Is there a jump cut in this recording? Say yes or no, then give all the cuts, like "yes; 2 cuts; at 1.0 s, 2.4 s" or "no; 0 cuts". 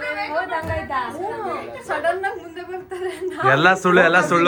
no; 0 cuts